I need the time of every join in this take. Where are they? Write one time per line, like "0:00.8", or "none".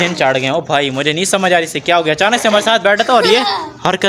none